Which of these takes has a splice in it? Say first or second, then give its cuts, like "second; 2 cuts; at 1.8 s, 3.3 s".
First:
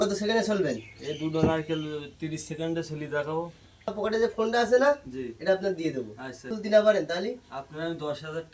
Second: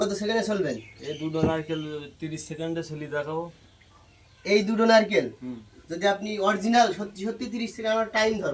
first; 2 cuts; at 4.0 s, 6.5 s